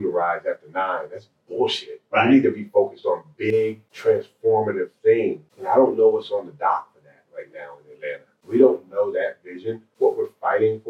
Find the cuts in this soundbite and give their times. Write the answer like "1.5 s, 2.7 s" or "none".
3.9 s, 5.5 s, 8.4 s, 9.8 s